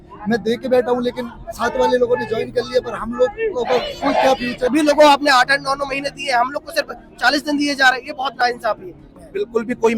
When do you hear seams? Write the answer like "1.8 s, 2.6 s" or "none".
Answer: 4.7 s, 9.2 s